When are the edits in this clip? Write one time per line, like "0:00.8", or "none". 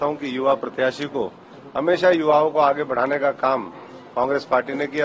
none